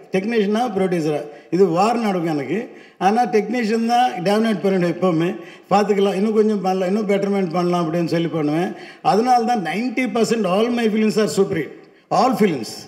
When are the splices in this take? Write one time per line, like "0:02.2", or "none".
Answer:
none